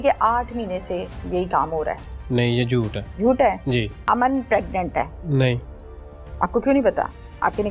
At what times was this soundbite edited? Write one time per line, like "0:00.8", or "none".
0:03.0
0:04.0
0:05.2